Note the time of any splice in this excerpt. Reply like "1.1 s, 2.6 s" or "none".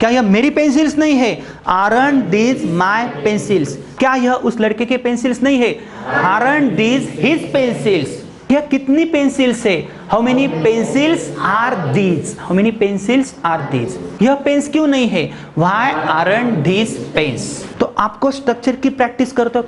17.6 s